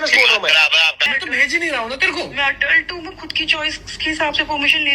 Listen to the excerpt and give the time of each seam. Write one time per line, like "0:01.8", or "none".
0:01.1